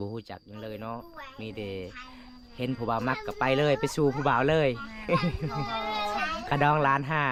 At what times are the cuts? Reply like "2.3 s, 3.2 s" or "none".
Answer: none